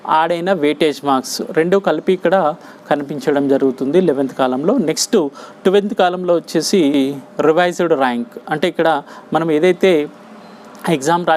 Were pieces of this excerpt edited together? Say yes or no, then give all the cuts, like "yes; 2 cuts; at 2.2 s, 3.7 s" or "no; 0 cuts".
no; 0 cuts